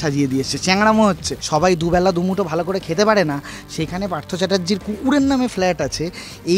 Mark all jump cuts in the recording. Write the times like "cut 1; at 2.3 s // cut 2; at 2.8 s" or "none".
cut 1; at 1.3 s